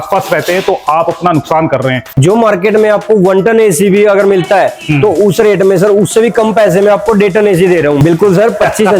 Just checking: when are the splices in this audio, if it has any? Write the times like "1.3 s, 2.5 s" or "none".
2.1 s, 8.0 s